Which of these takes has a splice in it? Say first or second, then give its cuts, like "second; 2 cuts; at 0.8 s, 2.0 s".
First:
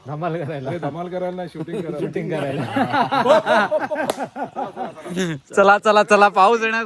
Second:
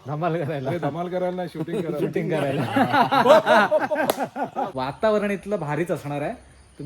second; 1 cut; at 4.7 s